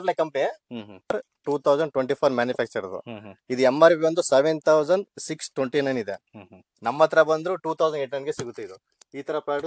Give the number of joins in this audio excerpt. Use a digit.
1